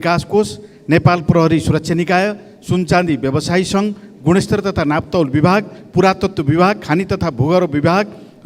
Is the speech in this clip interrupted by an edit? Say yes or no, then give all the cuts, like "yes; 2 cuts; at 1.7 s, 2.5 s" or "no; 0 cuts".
no; 0 cuts